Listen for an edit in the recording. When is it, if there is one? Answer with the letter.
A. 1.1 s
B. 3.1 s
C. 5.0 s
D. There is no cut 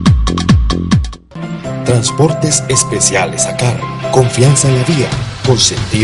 A